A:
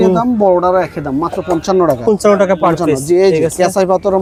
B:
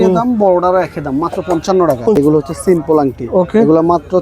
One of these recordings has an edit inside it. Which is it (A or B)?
B